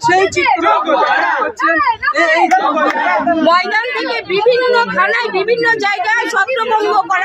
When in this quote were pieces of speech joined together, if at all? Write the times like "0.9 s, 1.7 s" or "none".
3.2 s

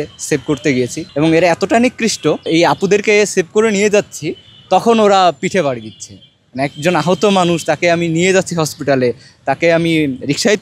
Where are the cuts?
1.0 s, 2.4 s

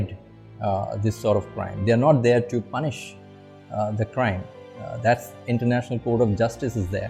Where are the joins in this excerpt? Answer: none

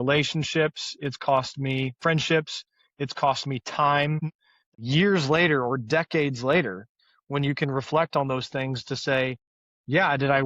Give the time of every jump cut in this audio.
4.2 s

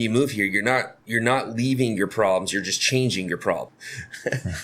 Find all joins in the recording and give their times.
1.0 s, 3.7 s

